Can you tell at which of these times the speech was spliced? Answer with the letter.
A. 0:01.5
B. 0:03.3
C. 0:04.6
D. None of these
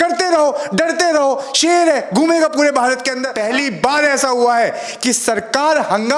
B